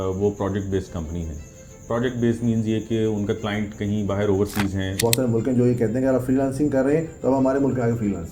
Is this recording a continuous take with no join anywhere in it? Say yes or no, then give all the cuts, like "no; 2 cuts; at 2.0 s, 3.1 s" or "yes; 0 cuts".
no; 1 cut; at 5.0 s